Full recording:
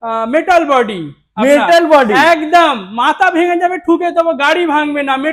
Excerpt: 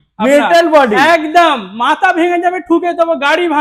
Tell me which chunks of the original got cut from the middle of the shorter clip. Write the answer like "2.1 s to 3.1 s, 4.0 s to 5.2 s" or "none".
none

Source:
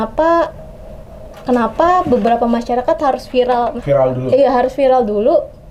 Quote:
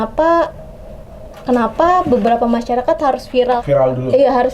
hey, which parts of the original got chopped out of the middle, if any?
3.6 s to 3.8 s

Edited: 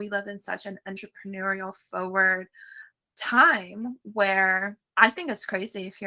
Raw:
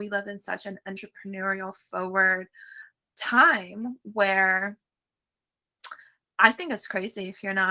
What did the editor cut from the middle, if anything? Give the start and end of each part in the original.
4.8 s to 6.2 s

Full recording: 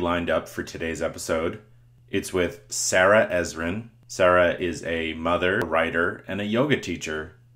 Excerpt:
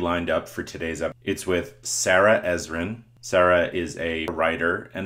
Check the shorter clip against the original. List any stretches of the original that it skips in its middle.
1.2 s to 2.0 s, 5.2 s to 5.6 s

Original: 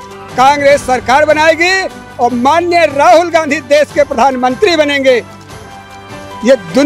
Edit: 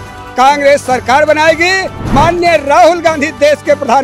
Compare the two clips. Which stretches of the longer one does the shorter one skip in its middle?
2.1 s to 2.4 s

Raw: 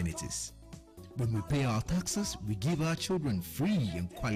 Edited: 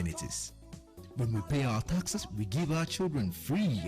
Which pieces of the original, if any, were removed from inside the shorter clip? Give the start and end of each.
2.1 s to 2.2 s

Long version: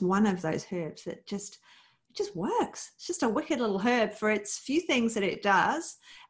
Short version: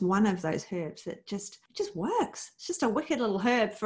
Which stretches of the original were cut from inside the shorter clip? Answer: 1.6 s to 2.0 s

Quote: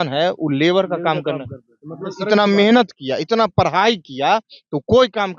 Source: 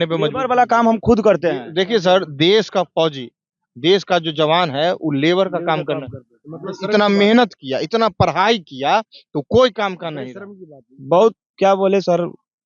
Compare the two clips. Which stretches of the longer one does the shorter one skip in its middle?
none

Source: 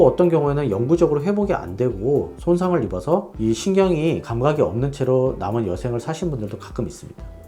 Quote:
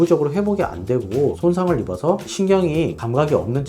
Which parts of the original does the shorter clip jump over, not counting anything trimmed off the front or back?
2.3 s to 2.4 s, 3.4 s to 3.6 s

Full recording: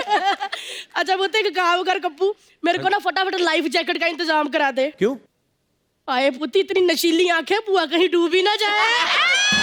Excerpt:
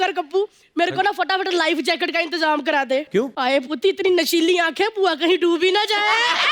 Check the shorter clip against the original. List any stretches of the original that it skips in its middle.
5.2 s to 6.0 s

